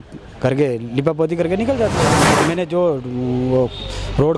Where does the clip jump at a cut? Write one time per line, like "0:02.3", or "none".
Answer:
0:02.2